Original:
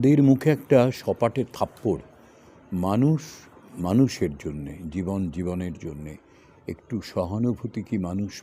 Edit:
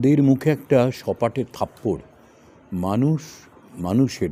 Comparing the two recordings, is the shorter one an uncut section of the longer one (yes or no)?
yes